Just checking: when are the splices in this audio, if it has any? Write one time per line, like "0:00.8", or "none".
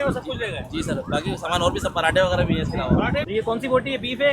0:03.3